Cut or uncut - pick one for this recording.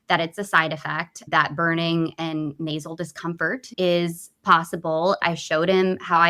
cut